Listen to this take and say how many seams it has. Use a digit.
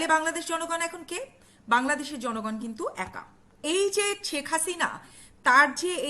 1